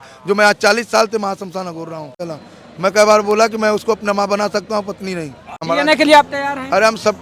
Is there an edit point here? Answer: yes; 2 cuts; at 2.3 s, 5.5 s

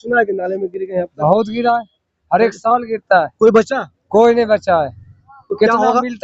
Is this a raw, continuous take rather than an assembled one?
yes; 0 cuts

